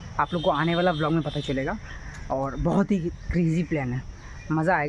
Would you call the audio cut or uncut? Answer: uncut